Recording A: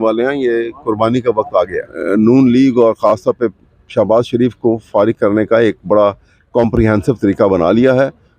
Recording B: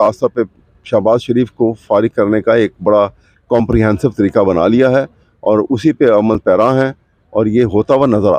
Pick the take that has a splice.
A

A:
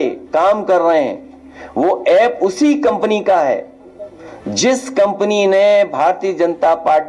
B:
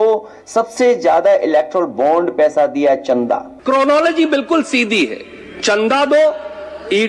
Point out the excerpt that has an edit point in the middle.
B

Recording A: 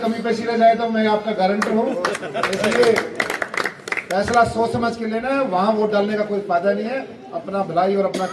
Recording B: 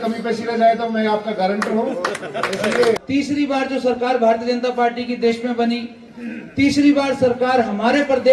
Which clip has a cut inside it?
B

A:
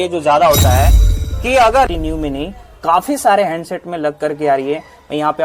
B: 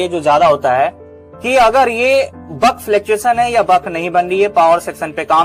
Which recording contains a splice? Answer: A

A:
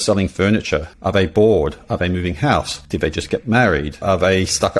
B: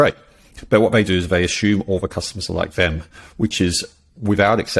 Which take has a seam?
A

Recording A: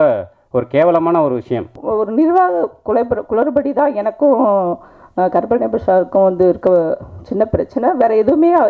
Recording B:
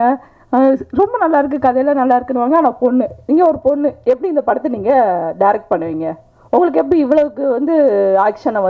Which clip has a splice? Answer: A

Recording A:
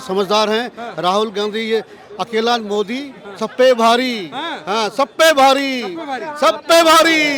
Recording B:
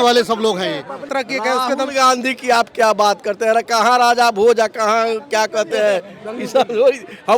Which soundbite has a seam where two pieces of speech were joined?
B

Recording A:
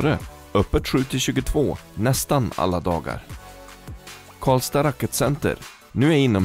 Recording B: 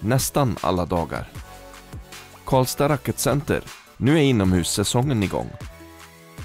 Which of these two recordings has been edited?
B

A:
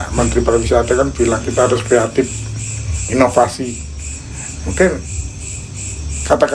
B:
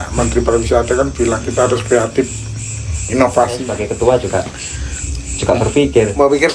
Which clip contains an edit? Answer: B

